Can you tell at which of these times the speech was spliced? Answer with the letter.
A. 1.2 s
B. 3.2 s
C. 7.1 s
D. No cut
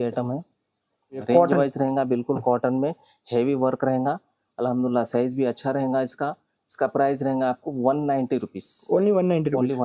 A